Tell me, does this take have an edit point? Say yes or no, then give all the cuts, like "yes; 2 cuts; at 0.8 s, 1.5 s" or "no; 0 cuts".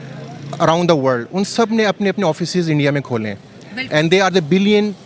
no; 0 cuts